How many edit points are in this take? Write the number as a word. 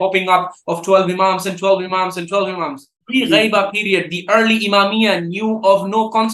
one